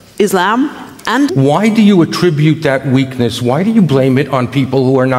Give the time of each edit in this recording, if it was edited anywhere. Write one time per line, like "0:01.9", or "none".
0:01.3